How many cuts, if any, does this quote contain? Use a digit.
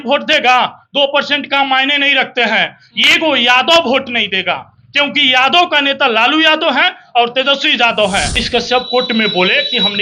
1